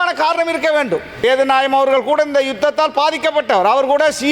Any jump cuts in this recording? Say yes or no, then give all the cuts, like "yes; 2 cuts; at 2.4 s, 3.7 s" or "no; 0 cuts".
yes; 1 cut; at 1.2 s